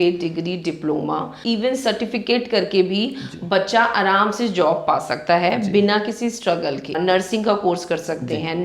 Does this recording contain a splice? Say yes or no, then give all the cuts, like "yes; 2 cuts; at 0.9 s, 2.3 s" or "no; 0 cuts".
yes; 2 cuts; at 1.3 s, 7.0 s